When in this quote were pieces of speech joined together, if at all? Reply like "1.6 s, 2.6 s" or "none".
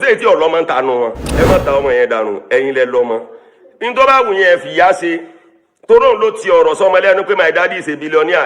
1.2 s

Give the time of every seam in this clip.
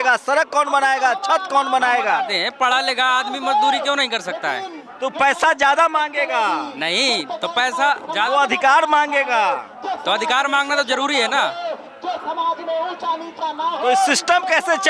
none

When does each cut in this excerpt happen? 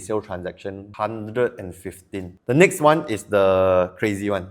0.9 s, 2.4 s

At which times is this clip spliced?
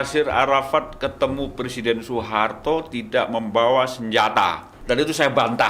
4.7 s

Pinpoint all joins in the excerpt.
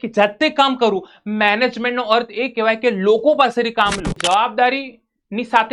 4.2 s

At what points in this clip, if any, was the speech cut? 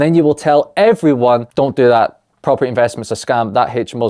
1.5 s

